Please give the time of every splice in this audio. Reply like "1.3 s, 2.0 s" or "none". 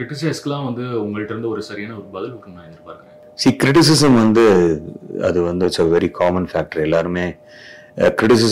none